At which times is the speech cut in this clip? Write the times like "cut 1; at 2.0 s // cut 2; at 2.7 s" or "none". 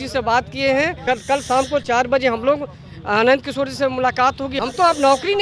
cut 1; at 1.0 s // cut 2; at 4.5 s